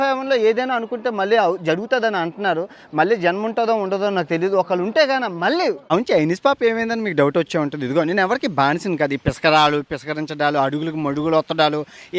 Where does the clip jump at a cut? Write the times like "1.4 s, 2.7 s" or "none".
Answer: 5.9 s